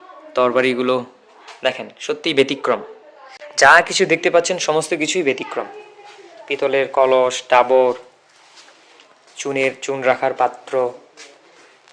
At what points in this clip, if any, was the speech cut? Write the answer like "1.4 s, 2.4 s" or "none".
none